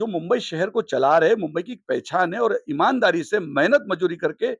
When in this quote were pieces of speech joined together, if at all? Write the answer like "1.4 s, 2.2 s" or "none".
none